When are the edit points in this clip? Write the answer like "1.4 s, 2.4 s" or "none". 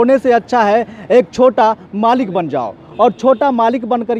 none